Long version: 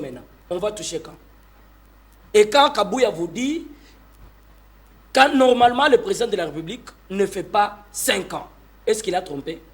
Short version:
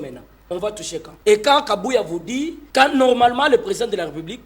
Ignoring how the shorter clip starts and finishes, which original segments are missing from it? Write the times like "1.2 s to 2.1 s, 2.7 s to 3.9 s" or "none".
1.1 s to 2.2 s, 3.7 s to 5.0 s